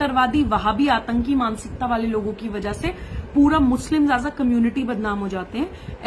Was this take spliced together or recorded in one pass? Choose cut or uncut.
uncut